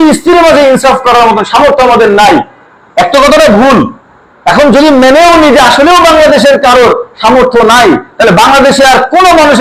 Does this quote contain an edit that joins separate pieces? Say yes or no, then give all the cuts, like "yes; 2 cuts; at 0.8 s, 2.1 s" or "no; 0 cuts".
no; 0 cuts